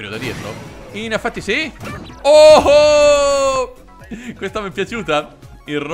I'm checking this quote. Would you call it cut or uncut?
uncut